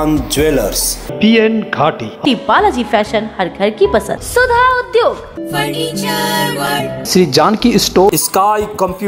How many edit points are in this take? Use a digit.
2